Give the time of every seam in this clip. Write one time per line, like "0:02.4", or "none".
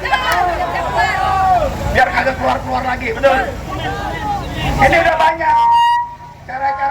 none